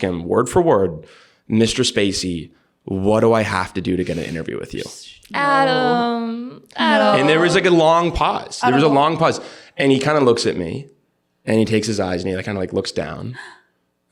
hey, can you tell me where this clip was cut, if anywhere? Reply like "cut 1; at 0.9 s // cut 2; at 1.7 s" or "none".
none